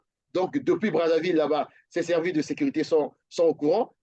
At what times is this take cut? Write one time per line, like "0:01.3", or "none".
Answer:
none